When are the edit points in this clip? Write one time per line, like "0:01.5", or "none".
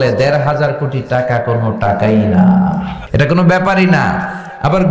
0:03.0